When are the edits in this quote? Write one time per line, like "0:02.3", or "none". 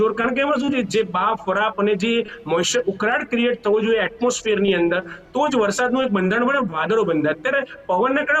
none

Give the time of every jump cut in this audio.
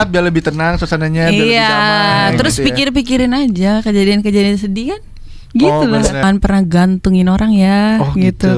0:06.2

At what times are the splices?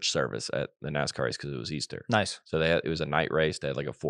none

